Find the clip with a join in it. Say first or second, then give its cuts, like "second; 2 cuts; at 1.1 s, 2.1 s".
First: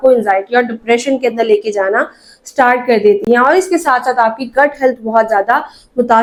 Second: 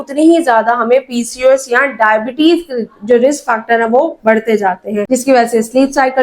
second; 1 cut; at 5.1 s